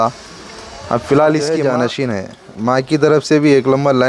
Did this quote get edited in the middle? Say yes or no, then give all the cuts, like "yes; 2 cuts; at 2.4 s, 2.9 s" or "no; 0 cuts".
yes; 1 cut; at 1.6 s